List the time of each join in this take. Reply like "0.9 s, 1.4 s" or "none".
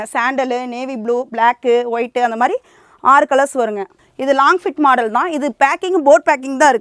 4.0 s